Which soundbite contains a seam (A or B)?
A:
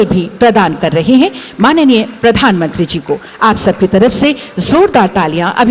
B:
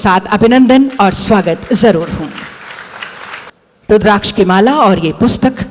B